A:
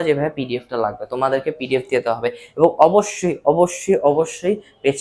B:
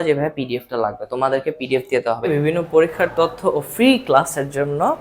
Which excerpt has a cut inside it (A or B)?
B